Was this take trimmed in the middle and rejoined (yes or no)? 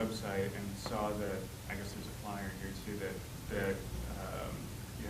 yes